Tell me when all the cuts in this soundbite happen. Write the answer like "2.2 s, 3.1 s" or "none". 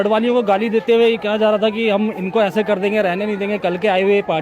none